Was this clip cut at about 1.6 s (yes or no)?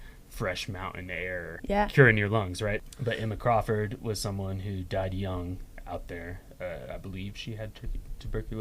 yes